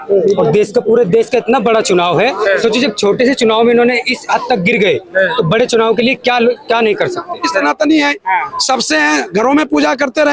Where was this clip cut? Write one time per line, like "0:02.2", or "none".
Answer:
0:07.6